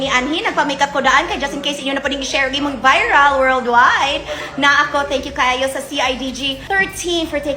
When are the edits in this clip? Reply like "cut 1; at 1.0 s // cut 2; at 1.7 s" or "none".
none